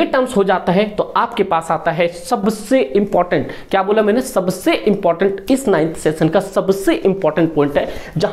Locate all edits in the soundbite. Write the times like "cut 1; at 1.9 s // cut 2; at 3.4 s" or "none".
none